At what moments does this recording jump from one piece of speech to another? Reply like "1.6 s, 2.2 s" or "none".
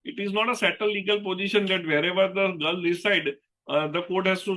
none